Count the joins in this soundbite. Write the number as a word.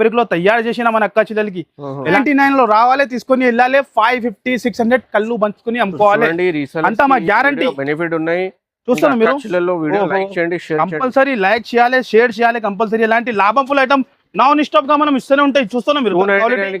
one